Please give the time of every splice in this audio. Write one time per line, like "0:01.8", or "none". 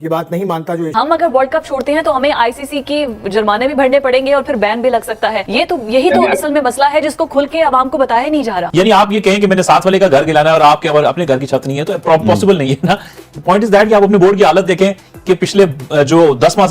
0:00.9
0:05.4
0:08.6